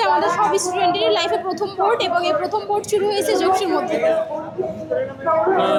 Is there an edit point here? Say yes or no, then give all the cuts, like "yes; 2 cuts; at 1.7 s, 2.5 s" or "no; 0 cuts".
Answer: no; 0 cuts